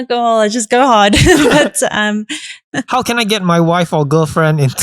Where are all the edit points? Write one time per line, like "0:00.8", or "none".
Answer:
0:02.7